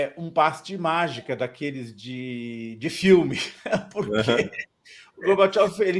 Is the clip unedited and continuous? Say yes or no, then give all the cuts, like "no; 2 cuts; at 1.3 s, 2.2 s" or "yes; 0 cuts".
yes; 0 cuts